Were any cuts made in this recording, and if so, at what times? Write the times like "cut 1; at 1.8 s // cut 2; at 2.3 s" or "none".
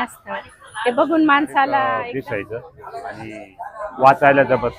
cut 1; at 2.0 s